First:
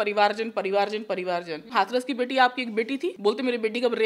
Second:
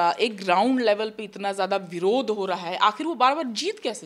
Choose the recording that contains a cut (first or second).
first